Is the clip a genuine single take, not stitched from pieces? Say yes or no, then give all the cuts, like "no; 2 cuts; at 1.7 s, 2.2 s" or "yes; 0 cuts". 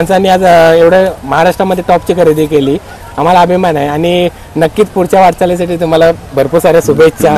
yes; 0 cuts